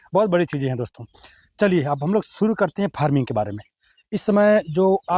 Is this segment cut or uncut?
uncut